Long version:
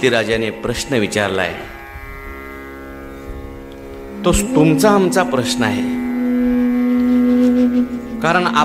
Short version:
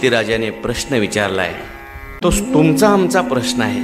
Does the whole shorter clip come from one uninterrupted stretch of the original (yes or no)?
no